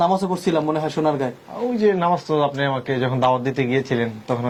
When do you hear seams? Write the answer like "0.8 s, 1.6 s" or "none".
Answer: none